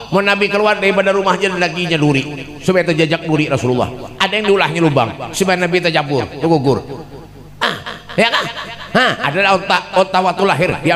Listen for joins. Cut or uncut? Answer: uncut